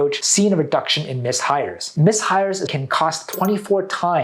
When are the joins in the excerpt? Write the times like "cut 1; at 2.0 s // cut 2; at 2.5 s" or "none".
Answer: cut 1; at 2.7 s